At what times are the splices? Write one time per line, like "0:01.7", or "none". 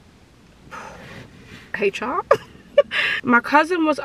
0:03.0